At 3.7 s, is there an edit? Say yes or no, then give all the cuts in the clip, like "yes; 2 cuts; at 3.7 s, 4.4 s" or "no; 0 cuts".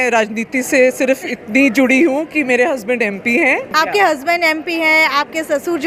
yes; 1 cut; at 3.7 s